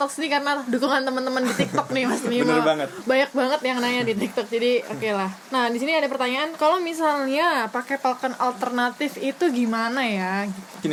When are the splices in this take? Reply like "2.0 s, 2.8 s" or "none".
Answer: none